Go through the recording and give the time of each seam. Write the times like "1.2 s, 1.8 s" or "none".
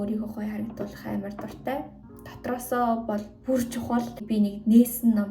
4.2 s